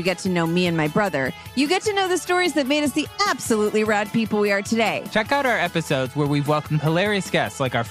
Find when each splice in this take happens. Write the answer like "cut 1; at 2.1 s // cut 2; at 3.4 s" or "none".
cut 1; at 5.1 s